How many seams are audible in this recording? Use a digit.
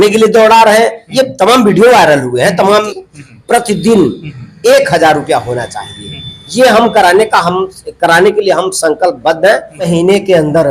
2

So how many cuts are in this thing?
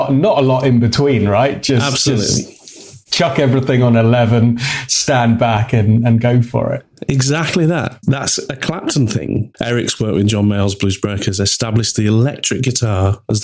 2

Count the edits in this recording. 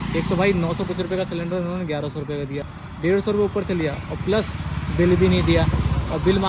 0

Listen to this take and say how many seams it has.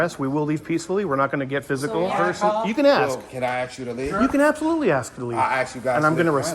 1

